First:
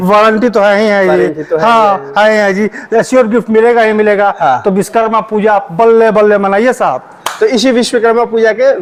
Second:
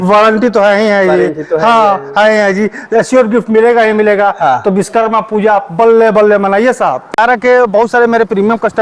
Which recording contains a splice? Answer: second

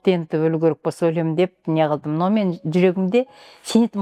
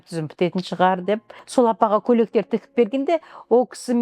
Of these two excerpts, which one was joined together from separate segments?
second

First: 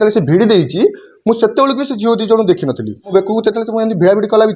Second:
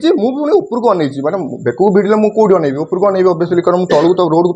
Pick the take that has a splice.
first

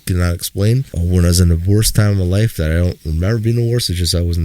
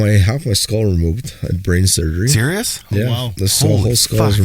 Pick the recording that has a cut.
first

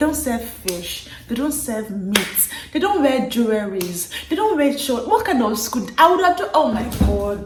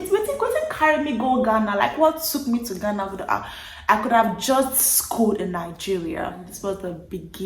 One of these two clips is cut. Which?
second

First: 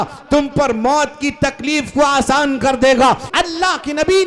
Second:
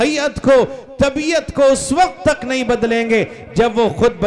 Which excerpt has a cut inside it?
first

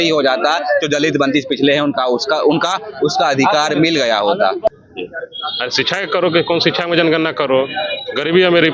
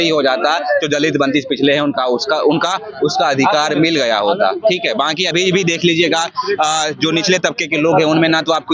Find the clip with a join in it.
first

